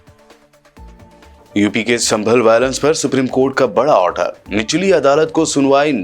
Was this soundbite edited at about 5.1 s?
no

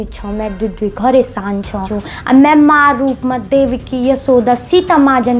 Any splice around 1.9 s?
yes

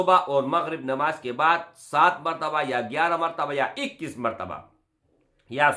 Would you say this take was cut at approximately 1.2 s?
no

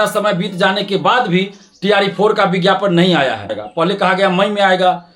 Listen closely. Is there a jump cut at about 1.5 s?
no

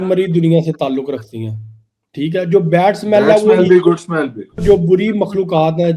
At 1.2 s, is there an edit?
no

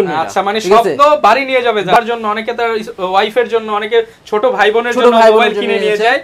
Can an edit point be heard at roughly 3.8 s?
no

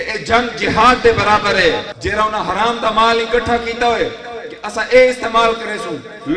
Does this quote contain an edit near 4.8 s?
no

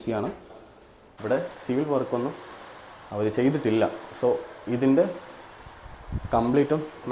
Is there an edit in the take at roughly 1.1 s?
yes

